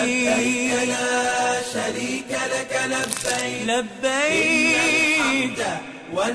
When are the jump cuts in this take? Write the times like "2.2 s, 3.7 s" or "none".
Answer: none